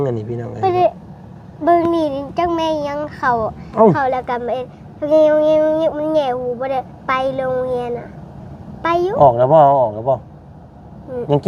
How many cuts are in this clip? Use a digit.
0